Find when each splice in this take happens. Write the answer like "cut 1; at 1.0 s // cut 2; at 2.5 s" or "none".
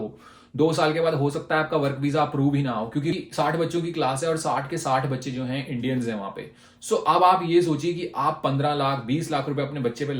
cut 1; at 3.1 s